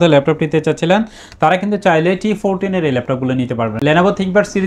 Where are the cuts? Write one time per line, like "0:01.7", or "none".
none